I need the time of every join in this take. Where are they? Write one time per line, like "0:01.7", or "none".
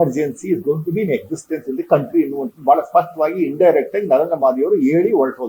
none